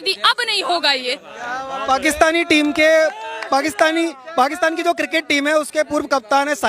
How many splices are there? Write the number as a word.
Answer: zero